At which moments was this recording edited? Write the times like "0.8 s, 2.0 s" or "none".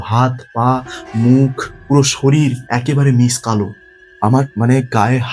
1.7 s, 2.6 s, 4.4 s